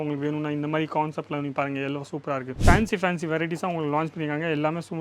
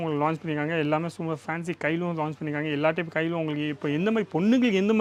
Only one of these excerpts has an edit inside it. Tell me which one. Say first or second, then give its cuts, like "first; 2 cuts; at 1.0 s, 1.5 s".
first; 1 cut; at 2.5 s